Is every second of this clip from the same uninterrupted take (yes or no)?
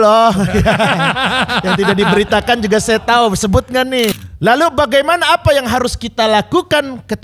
no